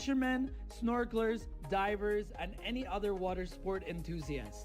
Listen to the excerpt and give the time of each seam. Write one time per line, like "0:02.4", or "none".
none